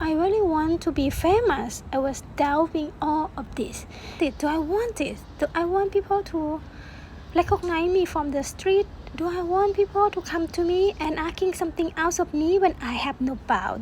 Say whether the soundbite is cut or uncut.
cut